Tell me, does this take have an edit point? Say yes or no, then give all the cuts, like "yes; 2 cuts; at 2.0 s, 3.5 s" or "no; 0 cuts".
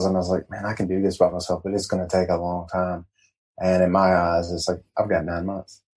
no; 0 cuts